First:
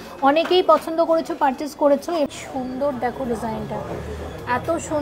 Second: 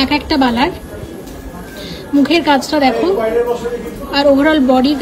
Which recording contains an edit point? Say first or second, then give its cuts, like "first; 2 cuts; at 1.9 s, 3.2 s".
first; 1 cut; at 2.3 s